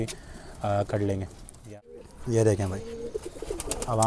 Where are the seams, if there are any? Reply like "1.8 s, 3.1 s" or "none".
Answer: 1.6 s